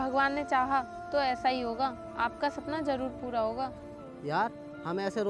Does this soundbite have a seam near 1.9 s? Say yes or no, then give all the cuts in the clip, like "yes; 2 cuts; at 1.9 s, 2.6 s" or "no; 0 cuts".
no; 1 cut; at 3.9 s